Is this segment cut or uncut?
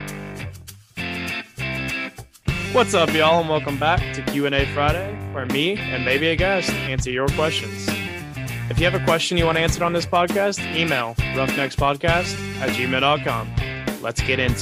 uncut